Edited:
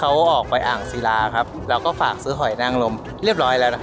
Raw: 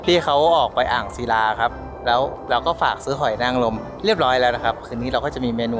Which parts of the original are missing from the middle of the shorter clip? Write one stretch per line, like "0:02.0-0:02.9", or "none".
0:01.8-0:02.4